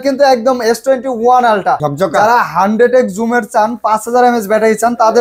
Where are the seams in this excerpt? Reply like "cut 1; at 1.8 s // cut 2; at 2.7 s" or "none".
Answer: cut 1; at 1.9 s